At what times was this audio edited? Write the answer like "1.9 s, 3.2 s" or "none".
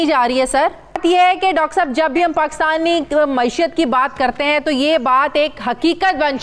1.0 s